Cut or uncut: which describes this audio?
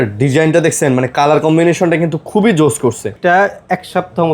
cut